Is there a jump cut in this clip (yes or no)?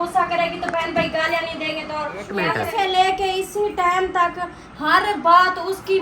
yes